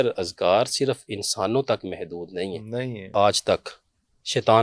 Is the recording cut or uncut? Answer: cut